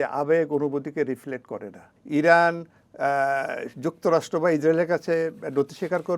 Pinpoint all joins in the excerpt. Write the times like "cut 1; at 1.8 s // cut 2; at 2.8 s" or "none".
cut 1; at 1.9 s